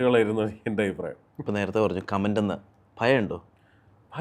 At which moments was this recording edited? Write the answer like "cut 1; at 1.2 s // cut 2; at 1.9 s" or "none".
none